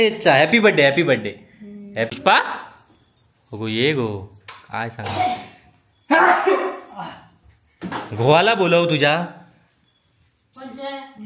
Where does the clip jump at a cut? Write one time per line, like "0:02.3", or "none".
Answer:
0:02.1